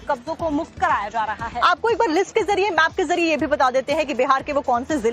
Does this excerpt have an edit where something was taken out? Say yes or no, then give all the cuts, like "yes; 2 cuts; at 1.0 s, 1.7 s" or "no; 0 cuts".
yes; 1 cut; at 2.0 s